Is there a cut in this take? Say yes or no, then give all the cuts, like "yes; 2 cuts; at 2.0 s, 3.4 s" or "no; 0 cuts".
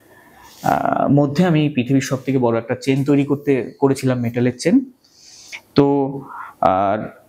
no; 0 cuts